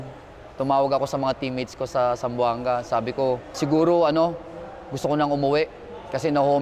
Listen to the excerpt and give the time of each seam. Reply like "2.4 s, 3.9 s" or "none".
3.6 s

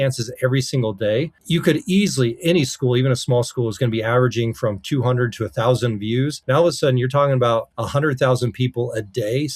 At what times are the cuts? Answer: 1.4 s, 6.4 s, 7.8 s

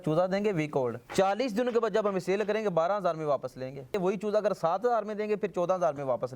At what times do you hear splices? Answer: 1.0 s, 4.0 s

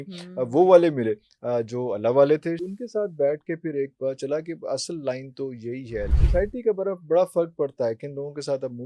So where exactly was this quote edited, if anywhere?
2.6 s, 6.2 s

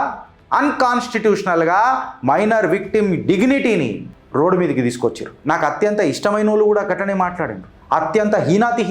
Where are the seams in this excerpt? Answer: 5.3 s

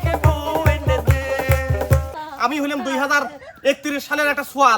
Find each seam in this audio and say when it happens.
2.1 s

